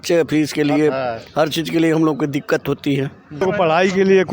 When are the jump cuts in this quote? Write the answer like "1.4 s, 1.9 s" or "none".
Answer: 3.4 s